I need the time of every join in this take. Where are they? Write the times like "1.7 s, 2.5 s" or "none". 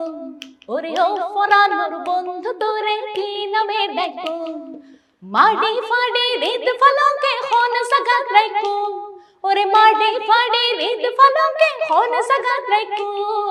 none